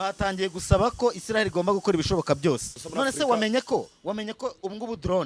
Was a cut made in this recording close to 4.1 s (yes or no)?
no